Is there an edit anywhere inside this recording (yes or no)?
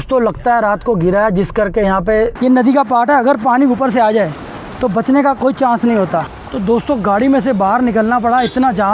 yes